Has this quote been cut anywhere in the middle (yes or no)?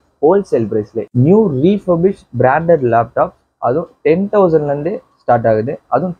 yes